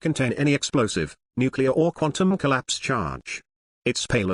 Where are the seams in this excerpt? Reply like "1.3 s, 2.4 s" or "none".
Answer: none